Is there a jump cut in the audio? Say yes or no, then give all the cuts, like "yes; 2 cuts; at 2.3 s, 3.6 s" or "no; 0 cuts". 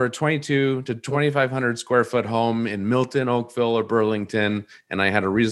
yes; 1 cut; at 0.9 s